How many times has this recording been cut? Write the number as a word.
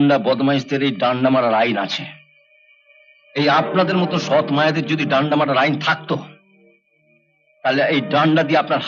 zero